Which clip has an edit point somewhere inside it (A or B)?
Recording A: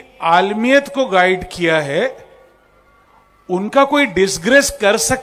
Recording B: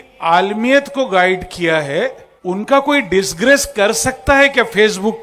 B